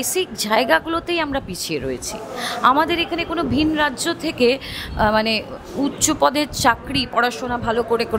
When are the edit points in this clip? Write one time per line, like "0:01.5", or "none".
none